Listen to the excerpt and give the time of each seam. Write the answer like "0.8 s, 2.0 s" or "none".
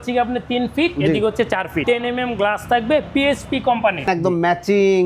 1.8 s, 4.1 s